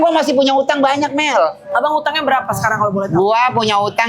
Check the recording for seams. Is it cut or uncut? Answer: uncut